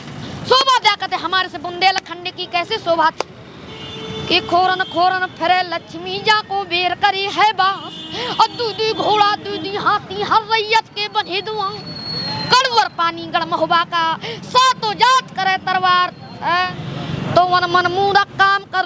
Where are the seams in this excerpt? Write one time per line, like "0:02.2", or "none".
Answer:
0:16.7